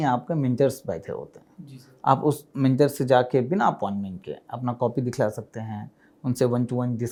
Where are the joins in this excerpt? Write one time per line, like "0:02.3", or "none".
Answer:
none